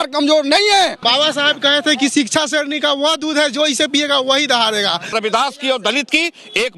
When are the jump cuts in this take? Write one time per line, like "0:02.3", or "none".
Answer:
0:01.0
0:05.1